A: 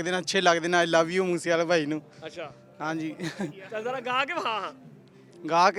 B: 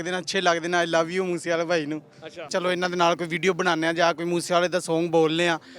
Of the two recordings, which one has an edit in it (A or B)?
B